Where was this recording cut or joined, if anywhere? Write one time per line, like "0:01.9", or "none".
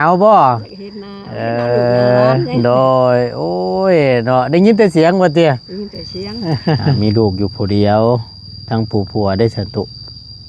0:07.0